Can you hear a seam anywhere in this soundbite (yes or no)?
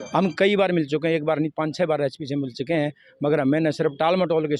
no